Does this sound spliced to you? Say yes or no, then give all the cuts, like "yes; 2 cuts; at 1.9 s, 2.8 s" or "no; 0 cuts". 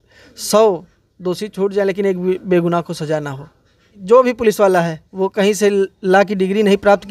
yes; 1 cut; at 3.9 s